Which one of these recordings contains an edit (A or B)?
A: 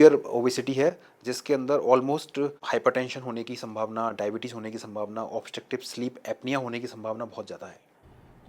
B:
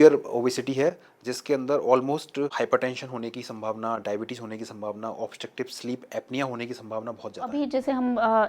B